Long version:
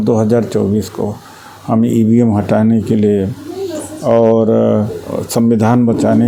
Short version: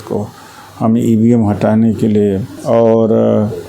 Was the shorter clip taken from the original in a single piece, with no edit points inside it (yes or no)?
no